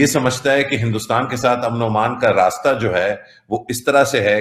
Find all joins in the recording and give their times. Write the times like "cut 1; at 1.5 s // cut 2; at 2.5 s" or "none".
none